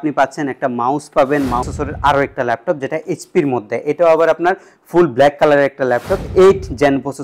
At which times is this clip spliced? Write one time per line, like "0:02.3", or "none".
0:01.7
0:06.2